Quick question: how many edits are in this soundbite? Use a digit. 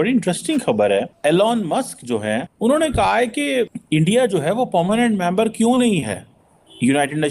3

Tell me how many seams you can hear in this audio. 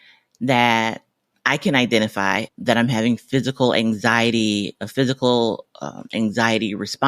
0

